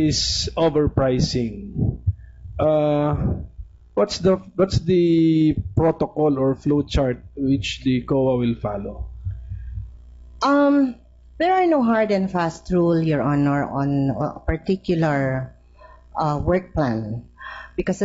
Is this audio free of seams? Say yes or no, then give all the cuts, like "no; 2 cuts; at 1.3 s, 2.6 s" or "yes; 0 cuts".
yes; 0 cuts